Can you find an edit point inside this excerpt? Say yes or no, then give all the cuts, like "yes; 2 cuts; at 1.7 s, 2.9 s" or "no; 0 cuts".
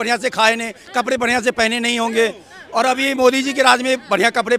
no; 0 cuts